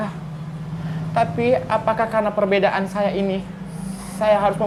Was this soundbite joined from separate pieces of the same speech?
no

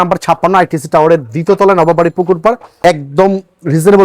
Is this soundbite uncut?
no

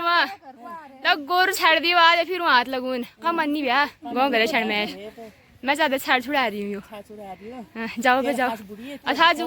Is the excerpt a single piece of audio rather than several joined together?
yes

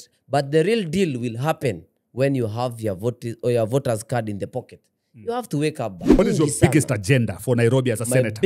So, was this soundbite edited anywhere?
yes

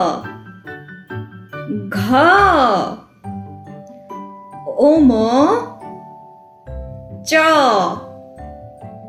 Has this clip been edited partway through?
no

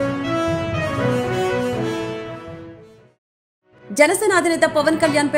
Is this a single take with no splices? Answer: no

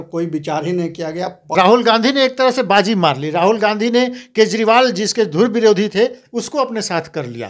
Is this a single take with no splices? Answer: no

